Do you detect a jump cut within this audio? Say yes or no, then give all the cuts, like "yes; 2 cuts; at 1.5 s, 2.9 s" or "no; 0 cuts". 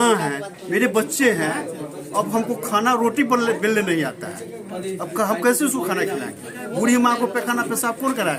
no; 0 cuts